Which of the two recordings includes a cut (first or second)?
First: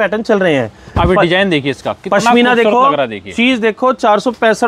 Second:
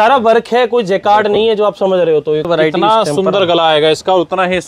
second